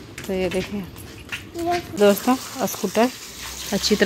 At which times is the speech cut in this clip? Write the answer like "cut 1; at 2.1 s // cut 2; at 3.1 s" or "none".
cut 1; at 1.9 s